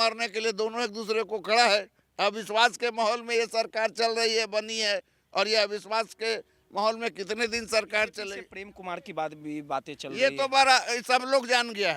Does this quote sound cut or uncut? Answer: uncut